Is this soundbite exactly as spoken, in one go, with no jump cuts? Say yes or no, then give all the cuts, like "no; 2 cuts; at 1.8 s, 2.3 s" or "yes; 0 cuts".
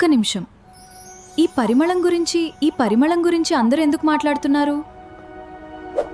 yes; 0 cuts